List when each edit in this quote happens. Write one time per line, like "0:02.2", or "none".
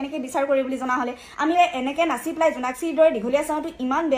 0:01.5